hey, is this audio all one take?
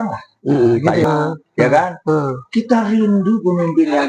no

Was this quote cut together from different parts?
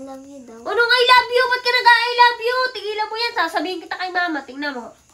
no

